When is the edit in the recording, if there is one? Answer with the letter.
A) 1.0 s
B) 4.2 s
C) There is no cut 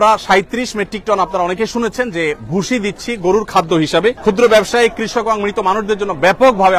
B